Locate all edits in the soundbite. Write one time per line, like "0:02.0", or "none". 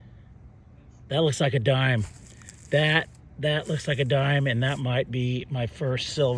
none